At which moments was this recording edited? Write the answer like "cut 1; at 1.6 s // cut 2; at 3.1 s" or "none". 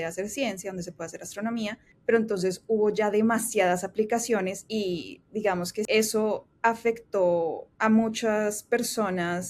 cut 1; at 1.9 s // cut 2; at 4.6 s // cut 3; at 5.9 s // cut 4; at 7.7 s